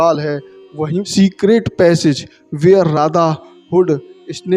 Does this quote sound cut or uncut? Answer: cut